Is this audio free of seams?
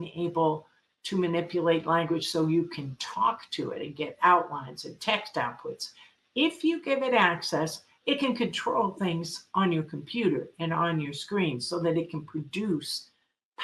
yes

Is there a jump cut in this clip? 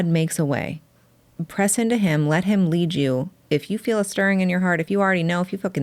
no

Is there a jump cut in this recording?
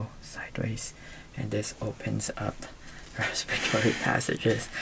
no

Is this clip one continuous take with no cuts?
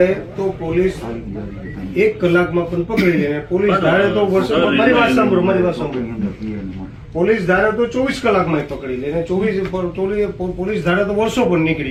yes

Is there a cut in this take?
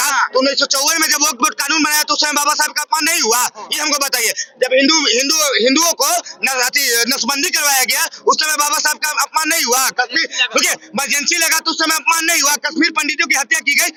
no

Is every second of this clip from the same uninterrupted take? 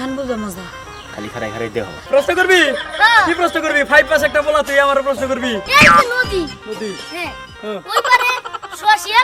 no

